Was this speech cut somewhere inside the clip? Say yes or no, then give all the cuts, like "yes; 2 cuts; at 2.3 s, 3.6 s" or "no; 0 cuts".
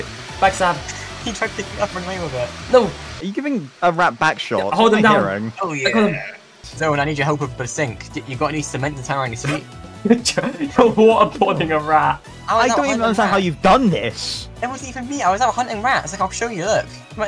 yes; 3 cuts; at 6.6 s, 9.8 s, 12.3 s